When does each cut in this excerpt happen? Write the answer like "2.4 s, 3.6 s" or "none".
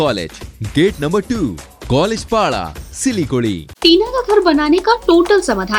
3.7 s